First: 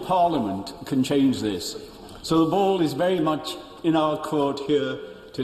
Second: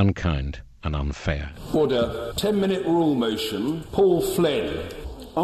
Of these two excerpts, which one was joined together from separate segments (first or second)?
second